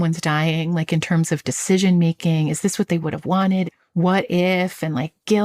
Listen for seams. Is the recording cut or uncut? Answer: cut